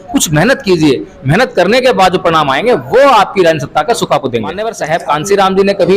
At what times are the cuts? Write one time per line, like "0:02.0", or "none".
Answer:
0:04.7